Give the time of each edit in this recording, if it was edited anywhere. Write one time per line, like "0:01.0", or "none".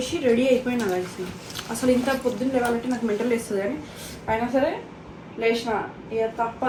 none